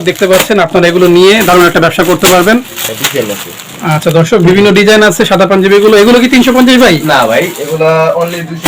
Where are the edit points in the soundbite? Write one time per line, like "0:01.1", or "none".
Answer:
0:03.0